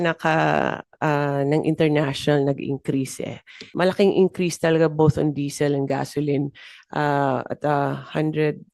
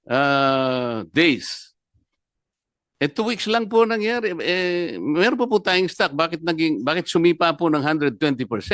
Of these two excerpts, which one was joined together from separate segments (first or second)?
first